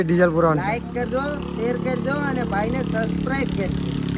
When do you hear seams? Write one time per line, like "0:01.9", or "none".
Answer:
none